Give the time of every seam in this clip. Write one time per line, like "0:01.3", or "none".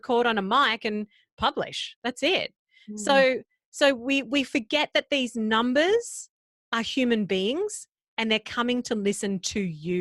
none